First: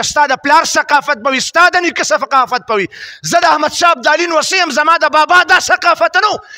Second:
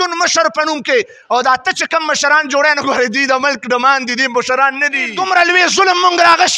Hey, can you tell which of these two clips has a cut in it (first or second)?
second